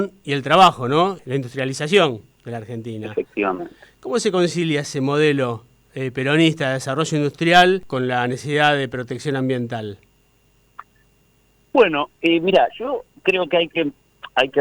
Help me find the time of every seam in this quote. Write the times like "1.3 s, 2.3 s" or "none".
1.2 s, 7.9 s